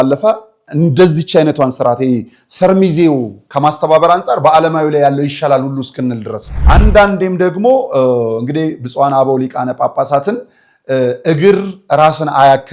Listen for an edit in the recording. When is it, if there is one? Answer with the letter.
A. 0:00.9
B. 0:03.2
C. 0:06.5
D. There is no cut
C